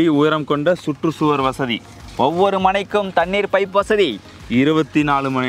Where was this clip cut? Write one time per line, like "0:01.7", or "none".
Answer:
none

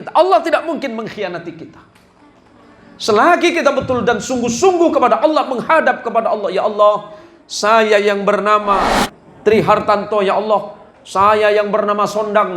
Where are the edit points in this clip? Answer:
0:08.9

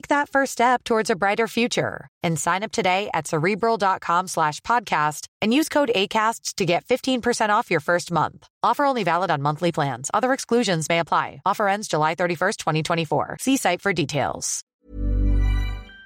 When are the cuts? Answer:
0:14.5

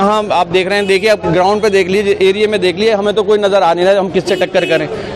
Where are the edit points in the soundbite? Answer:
none

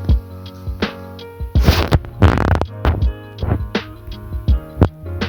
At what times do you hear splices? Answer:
none

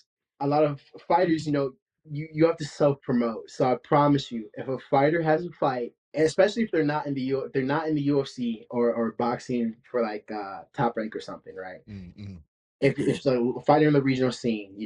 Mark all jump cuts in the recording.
0:06.0

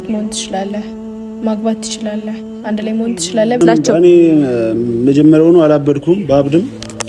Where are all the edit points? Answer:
0:03.6

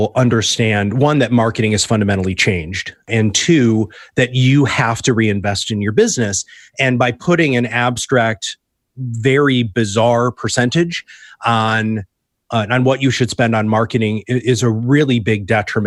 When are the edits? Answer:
none

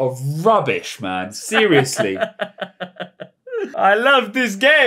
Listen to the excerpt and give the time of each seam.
0:03.7

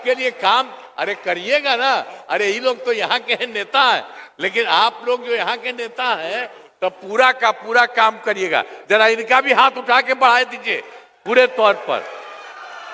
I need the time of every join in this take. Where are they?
none

